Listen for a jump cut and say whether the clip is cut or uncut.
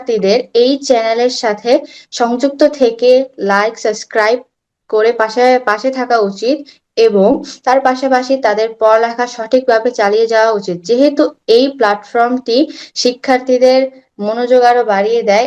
uncut